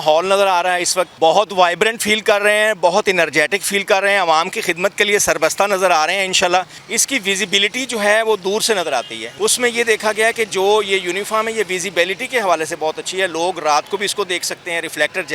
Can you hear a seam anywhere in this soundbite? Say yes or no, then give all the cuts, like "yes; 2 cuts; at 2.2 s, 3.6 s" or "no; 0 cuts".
yes; 3 cuts; at 1.1 s, 6.8 s, 9.2 s